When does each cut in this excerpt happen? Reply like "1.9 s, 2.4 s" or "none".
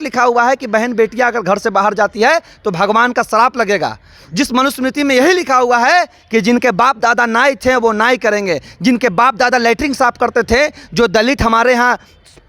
none